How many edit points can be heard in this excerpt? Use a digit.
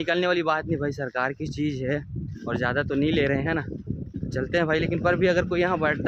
0